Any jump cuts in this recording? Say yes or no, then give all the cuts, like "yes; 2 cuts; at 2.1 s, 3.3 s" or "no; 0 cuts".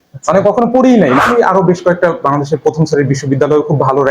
yes; 1 cut; at 1.2 s